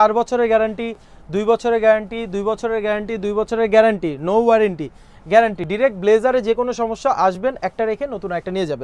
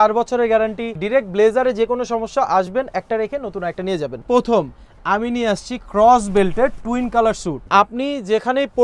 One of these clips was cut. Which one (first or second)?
second